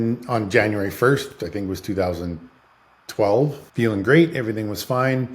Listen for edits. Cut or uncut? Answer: cut